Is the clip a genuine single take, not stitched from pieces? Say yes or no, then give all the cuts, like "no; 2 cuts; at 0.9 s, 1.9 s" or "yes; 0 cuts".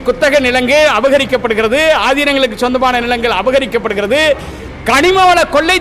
yes; 0 cuts